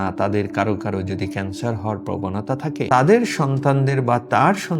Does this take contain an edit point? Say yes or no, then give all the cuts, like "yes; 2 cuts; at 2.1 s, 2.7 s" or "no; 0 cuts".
yes; 1 cut; at 2.9 s